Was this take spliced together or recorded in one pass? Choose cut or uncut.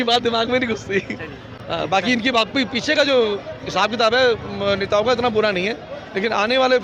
uncut